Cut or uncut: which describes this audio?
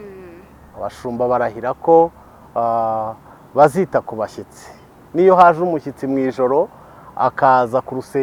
uncut